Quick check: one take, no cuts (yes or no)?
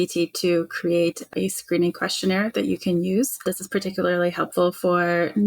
no